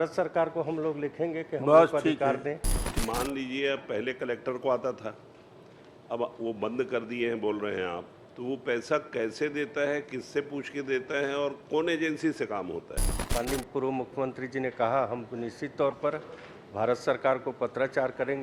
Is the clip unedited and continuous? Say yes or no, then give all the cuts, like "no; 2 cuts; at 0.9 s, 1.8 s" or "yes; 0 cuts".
no; 2 cuts; at 2.9 s, 13.3 s